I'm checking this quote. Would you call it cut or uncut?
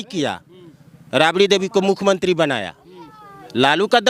uncut